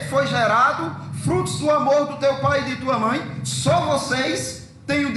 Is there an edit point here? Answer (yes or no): no